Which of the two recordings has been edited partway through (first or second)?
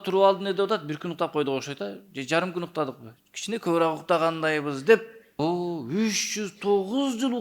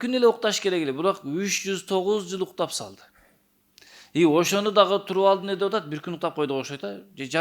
first